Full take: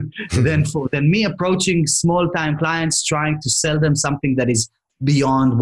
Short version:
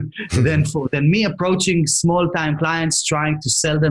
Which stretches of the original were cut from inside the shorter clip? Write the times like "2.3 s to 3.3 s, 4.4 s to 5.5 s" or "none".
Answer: none